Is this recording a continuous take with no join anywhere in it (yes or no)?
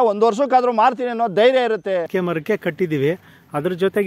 no